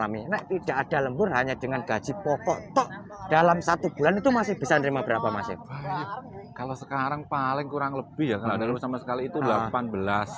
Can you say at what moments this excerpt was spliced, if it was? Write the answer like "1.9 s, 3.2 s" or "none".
none